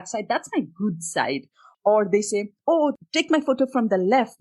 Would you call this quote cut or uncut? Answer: cut